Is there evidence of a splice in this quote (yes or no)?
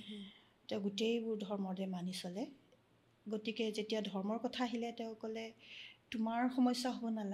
no